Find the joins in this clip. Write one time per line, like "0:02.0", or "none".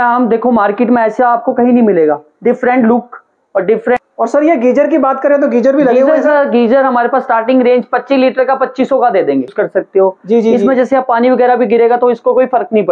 0:04.0
0:09.5

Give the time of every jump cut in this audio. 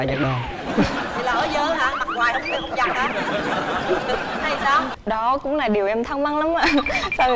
0:04.9

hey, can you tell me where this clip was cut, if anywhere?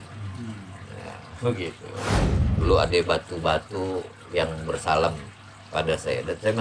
0:02.2

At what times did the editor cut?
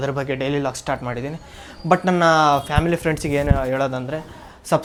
none

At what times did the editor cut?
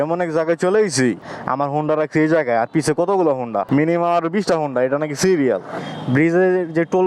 0:01.3
0:03.6
0:05.8

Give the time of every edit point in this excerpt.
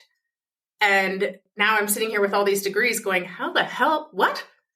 0:01.5

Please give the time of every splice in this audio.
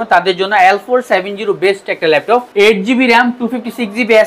0:02.5

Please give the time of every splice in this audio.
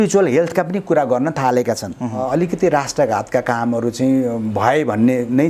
0:02.2

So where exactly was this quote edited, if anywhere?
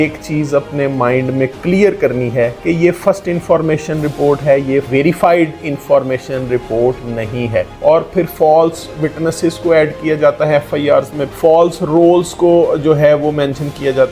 0:02.6
0:04.9
0:07.7

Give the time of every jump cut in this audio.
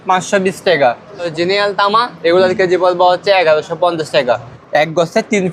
0:01.3
0:04.5

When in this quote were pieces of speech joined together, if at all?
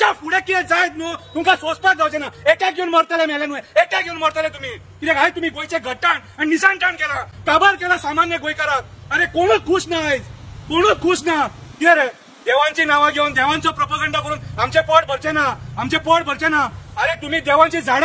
none

